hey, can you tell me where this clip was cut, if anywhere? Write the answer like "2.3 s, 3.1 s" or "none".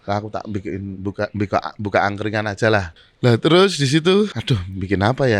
3.0 s, 4.4 s

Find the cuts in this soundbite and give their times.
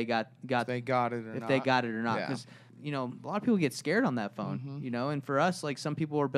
2.7 s

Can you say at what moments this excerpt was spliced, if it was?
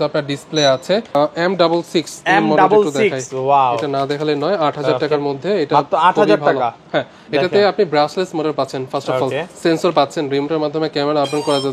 1.1 s

